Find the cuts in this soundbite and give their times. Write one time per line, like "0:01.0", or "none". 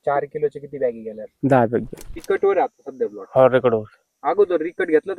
0:01.2
0:02.0